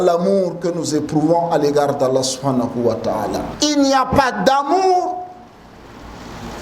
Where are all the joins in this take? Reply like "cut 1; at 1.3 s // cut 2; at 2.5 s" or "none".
cut 1; at 3.5 s